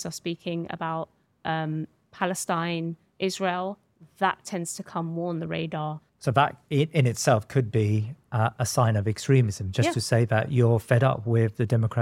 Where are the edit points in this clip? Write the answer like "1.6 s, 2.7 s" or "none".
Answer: 6.1 s